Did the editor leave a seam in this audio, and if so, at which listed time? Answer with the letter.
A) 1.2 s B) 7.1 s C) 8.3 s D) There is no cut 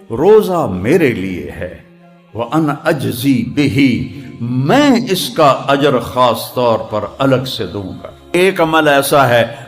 C